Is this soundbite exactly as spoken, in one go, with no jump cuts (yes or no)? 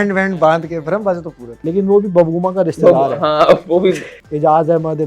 no